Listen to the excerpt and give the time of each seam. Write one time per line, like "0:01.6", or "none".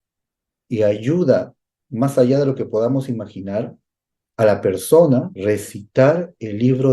0:05.3